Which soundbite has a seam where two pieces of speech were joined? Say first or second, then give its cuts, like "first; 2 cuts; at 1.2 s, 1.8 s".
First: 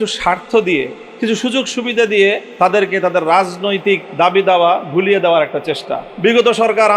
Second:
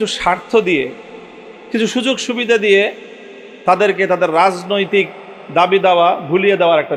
first; 4 cuts; at 1.0 s, 2.5 s, 4.1 s, 6.0 s